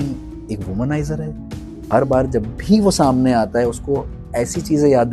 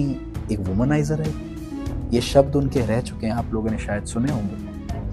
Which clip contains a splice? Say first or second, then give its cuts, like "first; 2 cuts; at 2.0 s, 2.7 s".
first; 1 cut; at 1.7 s